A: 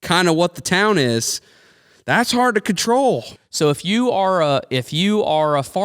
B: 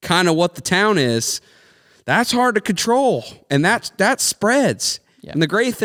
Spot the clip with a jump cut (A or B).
A